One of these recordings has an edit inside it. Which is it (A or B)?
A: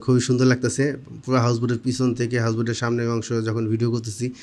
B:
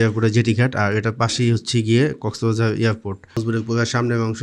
B